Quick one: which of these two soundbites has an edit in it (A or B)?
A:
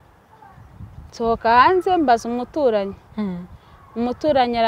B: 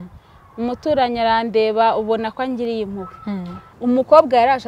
B